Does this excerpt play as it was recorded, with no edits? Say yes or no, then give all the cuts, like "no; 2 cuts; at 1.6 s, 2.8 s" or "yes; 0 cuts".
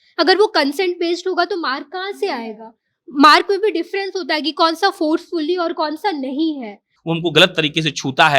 no; 1 cut; at 6.9 s